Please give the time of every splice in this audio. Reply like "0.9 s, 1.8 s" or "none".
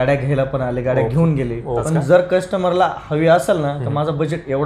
1.8 s